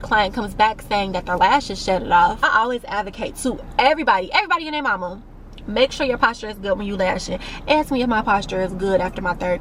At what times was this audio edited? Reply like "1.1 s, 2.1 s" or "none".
2.4 s